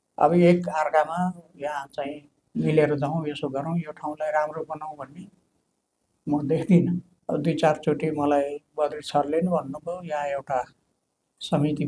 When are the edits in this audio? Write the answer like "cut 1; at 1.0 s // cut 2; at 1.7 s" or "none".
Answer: cut 1; at 7.1 s